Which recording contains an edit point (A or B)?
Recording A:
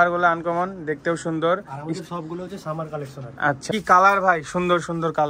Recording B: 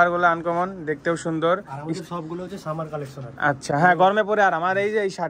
A